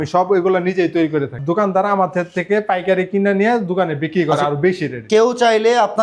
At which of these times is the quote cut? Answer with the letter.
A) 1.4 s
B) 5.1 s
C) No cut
A